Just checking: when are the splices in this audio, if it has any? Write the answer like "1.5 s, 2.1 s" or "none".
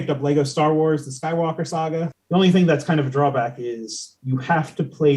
2.2 s